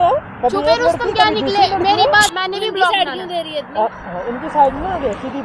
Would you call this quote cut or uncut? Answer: cut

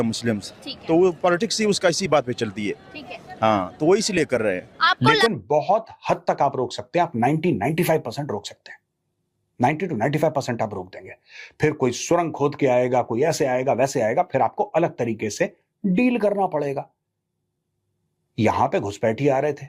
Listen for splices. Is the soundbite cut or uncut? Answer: cut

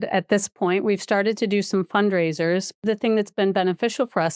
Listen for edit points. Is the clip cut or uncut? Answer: cut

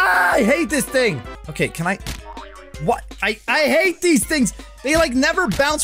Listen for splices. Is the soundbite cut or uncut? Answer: cut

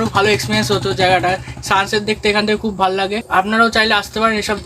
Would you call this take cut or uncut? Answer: cut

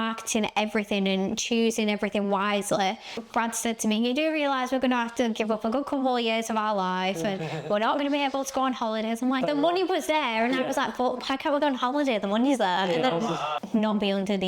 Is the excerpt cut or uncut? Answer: cut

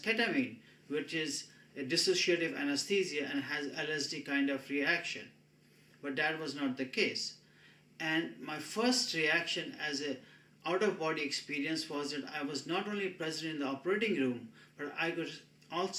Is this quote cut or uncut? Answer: uncut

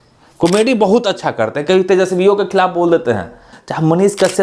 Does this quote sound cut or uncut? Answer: cut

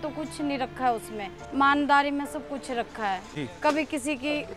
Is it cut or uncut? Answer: cut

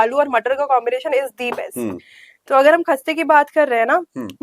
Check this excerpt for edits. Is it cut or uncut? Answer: uncut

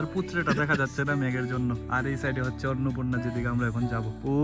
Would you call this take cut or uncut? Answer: uncut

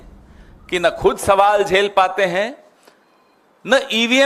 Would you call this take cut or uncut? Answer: uncut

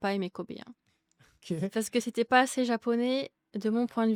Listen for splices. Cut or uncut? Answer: uncut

